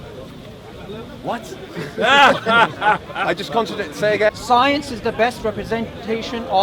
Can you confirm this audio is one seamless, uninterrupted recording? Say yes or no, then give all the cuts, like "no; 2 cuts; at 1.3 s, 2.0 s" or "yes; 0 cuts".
no; 1 cut; at 4.3 s